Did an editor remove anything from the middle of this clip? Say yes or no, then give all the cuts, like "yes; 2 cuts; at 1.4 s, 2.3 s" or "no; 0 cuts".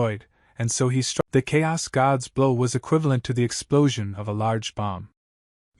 yes; 1 cut; at 1.2 s